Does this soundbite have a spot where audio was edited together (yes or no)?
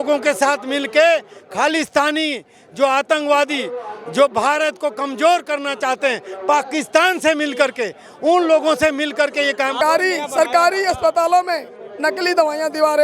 yes